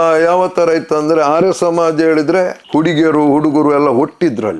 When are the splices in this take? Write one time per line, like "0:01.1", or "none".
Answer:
0:02.6